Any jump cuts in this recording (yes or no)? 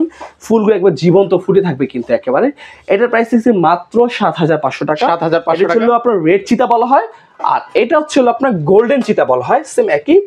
no